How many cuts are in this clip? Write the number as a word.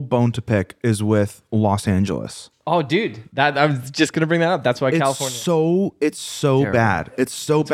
zero